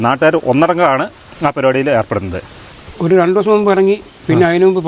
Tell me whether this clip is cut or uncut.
cut